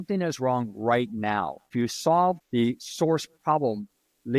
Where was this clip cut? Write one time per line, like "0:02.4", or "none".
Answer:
0:01.7
0:02.4